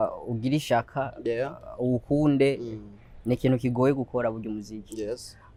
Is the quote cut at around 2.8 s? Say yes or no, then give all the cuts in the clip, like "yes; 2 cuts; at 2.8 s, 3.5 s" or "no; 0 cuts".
no; 0 cuts